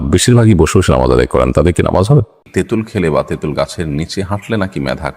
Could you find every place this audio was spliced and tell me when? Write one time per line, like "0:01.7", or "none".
0:02.4